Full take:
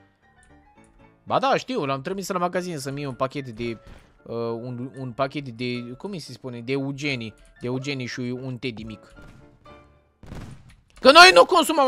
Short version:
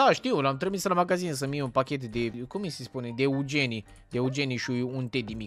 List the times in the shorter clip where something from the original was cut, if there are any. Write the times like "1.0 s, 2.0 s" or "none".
2.4 s